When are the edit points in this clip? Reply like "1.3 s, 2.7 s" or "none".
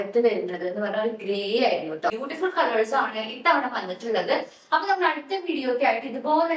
2.1 s